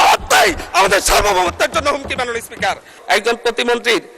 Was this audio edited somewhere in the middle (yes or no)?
yes